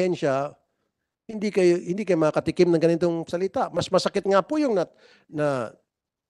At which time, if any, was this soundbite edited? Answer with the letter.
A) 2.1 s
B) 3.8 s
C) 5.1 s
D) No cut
D